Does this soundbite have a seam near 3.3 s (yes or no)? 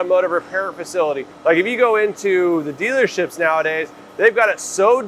no